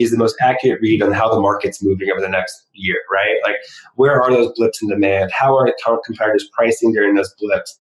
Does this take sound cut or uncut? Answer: uncut